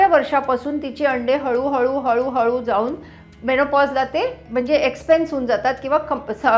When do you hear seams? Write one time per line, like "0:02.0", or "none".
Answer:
0:04.4